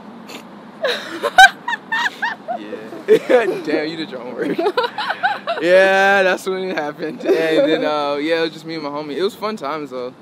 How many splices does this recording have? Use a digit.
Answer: 0